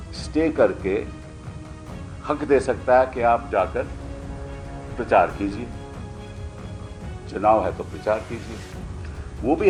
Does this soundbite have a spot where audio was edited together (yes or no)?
no